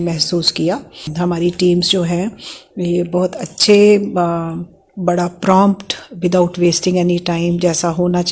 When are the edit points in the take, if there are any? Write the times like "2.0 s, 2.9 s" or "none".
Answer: 1.1 s